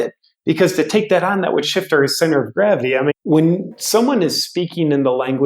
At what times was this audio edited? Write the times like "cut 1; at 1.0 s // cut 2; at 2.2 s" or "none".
cut 1; at 3.1 s